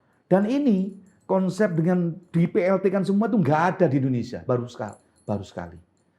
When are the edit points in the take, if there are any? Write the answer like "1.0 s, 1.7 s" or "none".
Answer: none